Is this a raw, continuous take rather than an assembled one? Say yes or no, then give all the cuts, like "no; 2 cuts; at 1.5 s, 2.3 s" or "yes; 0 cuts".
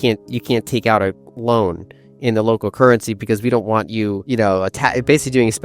no; 1 cut; at 4.2 s